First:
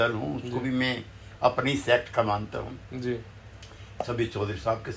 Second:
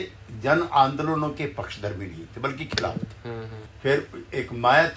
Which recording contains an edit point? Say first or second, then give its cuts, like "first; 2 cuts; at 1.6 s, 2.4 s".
second; 1 cut; at 3.6 s